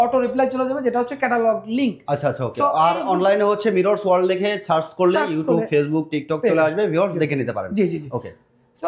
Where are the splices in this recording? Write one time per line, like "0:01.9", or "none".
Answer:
none